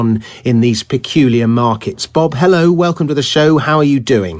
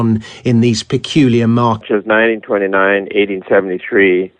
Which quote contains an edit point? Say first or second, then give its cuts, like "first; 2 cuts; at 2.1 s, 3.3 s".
first; 1 cut; at 1.8 s